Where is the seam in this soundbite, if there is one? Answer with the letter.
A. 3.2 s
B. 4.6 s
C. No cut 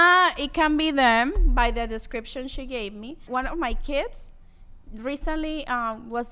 A